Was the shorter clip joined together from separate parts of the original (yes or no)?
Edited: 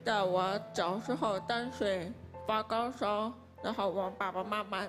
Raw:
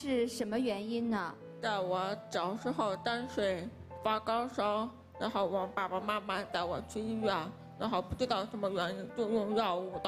no